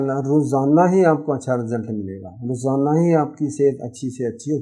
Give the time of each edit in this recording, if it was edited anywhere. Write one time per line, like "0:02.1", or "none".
none